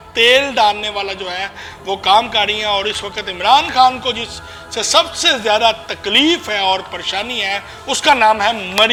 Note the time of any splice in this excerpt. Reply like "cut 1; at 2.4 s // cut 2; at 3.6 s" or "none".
none